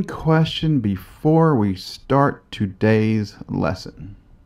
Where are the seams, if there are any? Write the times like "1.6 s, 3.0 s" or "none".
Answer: 3.3 s